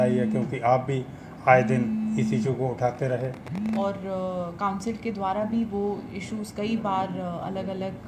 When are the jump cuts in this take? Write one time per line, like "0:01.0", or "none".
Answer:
0:03.8